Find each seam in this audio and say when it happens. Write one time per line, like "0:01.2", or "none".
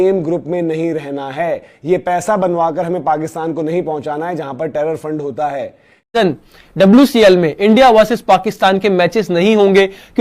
0:06.1